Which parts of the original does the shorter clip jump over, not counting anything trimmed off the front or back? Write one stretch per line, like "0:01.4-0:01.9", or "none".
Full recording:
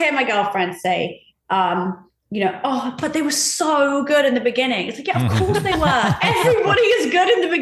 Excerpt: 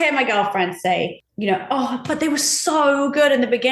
0:01.2-0:02.2